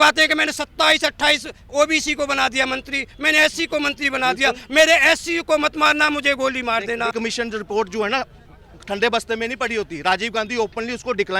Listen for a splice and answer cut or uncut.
cut